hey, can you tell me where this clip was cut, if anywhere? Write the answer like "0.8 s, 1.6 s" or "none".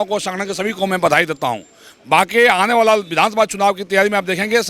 none